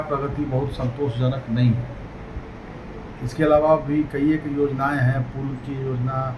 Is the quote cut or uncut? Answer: uncut